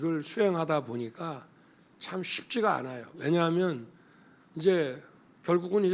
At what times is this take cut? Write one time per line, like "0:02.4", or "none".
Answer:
none